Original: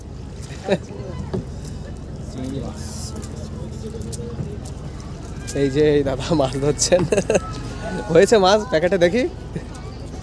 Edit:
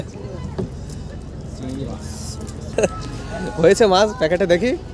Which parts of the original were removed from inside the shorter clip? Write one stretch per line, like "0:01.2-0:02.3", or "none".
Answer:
0:03.5-0:07.2